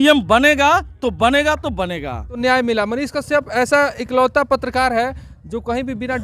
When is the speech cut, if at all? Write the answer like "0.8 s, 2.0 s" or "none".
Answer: 2.7 s